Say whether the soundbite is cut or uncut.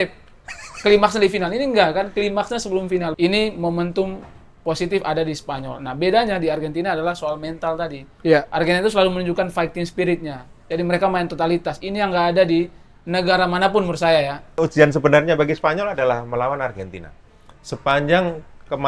cut